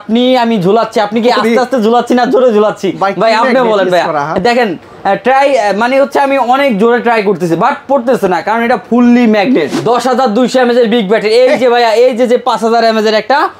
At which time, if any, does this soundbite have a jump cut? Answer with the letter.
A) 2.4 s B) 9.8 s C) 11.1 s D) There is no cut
B